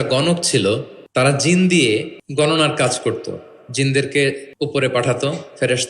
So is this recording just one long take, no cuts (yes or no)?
no